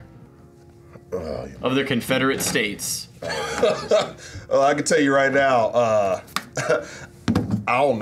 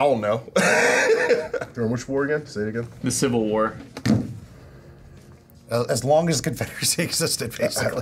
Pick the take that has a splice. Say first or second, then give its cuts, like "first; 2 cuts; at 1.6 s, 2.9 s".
second; 1 cut; at 1.7 s